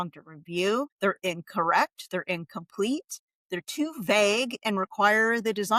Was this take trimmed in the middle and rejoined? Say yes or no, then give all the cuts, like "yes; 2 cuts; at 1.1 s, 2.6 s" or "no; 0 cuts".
yes; 1 cut; at 0.9 s